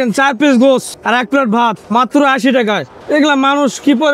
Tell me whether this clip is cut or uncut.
cut